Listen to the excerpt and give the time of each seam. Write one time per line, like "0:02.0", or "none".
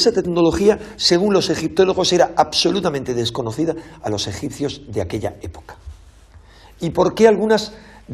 none